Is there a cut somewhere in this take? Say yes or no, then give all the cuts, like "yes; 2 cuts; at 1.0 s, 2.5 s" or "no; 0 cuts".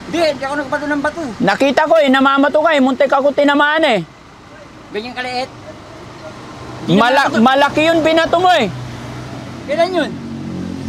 no; 0 cuts